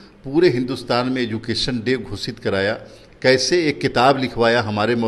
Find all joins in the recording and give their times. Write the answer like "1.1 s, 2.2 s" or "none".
none